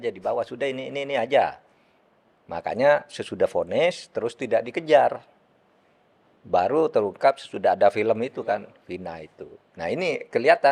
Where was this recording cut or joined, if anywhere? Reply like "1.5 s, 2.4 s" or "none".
none